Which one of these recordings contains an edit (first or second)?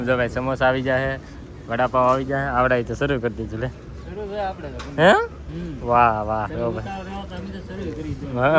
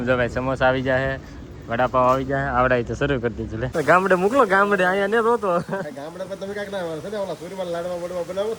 second